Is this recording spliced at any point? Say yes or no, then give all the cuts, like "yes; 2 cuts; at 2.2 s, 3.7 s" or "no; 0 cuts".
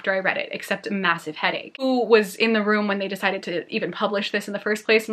yes; 1 cut; at 1.8 s